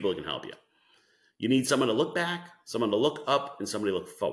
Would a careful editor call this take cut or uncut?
uncut